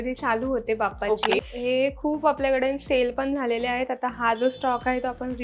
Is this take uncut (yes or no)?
no